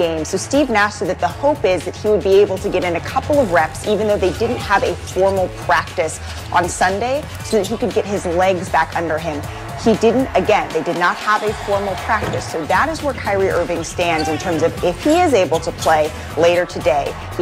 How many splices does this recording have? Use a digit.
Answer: 0